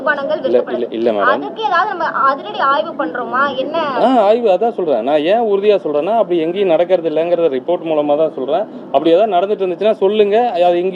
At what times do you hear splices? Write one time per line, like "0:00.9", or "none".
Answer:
none